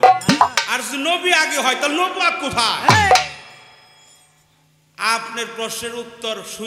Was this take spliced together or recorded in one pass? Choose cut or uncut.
uncut